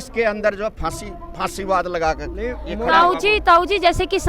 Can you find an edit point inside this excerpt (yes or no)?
no